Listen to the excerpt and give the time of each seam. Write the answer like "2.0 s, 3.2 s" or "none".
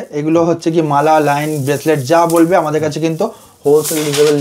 none